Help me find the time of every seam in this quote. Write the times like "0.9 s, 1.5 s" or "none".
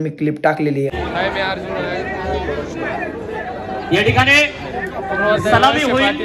0.9 s